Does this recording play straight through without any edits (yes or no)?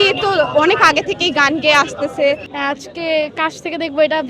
no